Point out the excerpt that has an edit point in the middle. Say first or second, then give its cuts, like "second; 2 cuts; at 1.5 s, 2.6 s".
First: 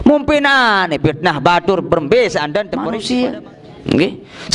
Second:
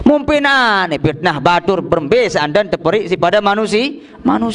first; 1 cut; at 2.8 s